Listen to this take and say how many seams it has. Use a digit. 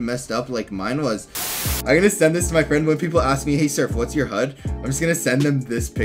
1